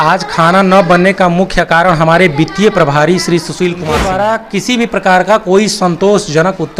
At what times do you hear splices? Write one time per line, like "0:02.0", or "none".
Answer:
0:03.8